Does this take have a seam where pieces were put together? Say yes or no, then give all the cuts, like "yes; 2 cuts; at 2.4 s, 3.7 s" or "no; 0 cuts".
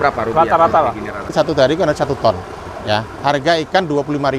yes; 1 cut; at 1.3 s